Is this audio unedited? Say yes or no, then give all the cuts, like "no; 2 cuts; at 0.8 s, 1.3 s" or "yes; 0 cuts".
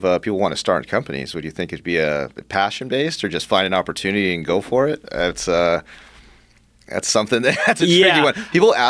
yes; 0 cuts